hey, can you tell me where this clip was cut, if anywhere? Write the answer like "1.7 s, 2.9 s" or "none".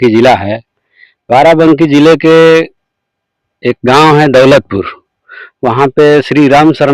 none